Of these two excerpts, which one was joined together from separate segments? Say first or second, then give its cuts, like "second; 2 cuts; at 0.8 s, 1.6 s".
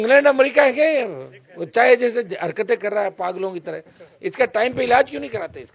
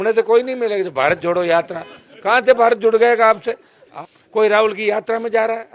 second; 1 cut; at 3.9 s